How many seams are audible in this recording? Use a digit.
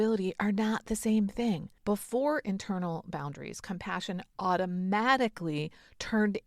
1